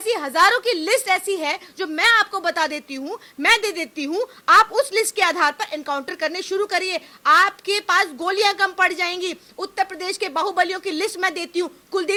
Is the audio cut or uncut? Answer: uncut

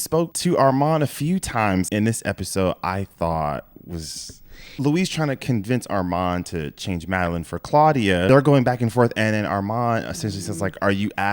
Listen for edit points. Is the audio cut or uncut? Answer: cut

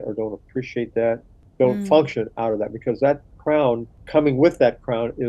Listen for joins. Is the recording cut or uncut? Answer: cut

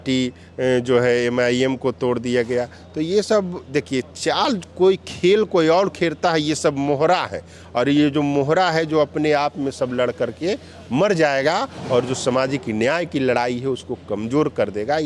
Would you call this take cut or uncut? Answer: uncut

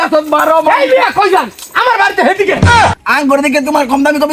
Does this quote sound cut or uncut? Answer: cut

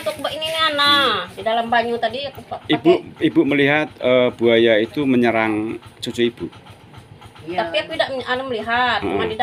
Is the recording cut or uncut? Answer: uncut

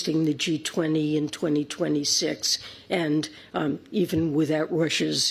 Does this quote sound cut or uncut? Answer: uncut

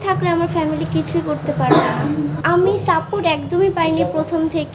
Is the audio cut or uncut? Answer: uncut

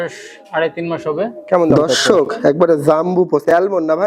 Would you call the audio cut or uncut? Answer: cut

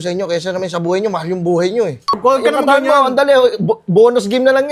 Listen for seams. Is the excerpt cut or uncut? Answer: cut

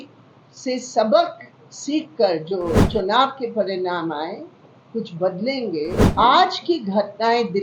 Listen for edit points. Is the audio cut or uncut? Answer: cut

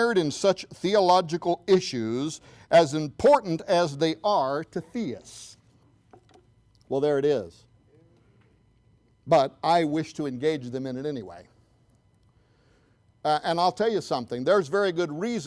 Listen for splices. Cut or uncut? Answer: uncut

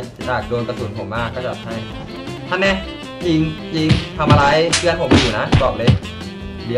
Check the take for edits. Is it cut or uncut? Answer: cut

